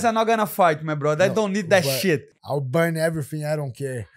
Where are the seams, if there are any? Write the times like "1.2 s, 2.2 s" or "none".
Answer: 2.4 s